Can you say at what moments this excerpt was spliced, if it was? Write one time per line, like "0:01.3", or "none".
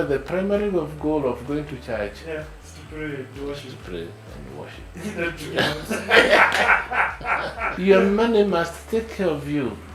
0:07.7